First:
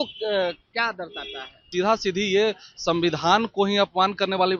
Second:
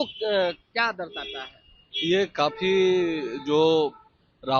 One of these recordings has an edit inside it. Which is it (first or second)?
first